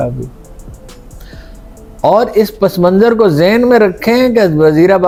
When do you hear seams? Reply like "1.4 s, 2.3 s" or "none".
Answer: none